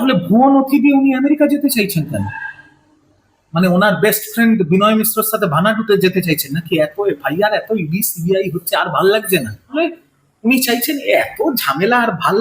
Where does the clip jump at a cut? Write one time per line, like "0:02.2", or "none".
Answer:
0:09.8